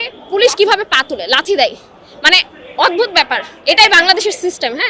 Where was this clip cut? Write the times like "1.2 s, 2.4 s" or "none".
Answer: none